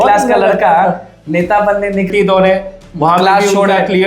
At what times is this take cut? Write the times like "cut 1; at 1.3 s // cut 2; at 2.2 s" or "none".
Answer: cut 1; at 2.1 s

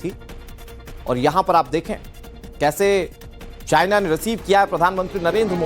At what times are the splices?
cut 1; at 1.7 s

